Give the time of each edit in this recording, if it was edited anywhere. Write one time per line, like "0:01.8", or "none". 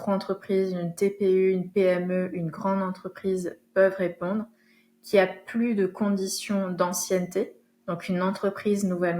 none

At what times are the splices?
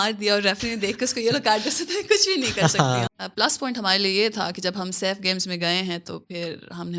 0:03.1

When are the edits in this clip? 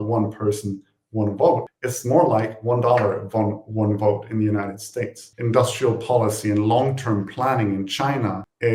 0:05.2

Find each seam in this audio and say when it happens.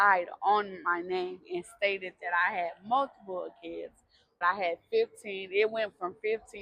0:04.4

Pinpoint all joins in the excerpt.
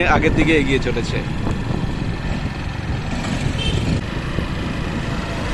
none

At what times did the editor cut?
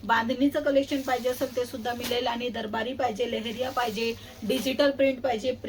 none

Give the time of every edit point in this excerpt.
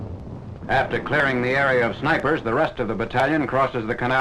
none

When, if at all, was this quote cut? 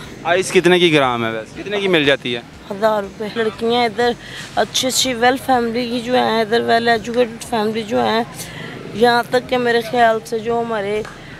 0:01.5
0:03.3

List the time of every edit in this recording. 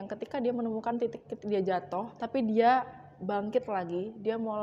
0:02.1

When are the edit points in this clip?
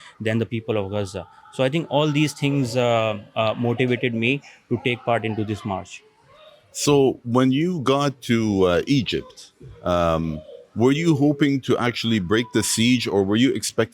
none

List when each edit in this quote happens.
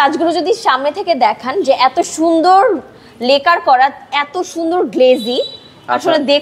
none

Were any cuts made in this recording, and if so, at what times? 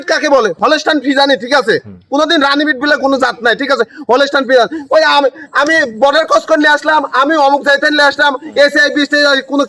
none

